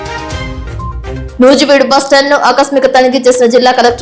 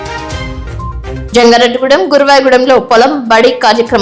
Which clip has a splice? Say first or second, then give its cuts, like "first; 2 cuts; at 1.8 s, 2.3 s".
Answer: second; 1 cut; at 1.1 s